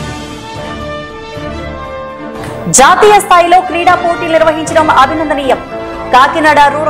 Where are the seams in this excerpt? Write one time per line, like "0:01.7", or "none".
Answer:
0:02.6